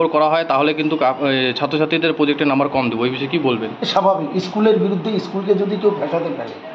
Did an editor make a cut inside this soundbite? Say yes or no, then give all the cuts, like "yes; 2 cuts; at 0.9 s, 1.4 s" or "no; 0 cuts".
no; 0 cuts